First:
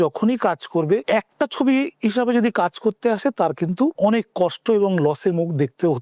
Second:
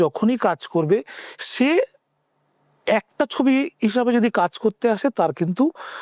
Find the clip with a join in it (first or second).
first